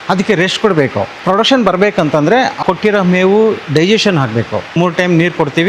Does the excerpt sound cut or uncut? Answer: cut